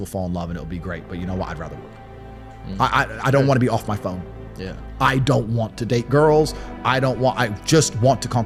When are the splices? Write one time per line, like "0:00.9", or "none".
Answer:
none